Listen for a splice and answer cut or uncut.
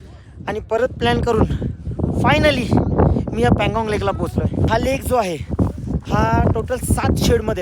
cut